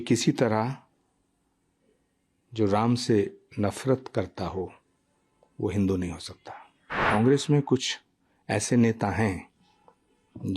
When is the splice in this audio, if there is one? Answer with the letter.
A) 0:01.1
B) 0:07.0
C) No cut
B